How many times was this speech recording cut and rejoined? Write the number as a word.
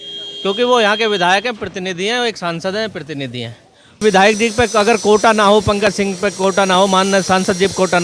one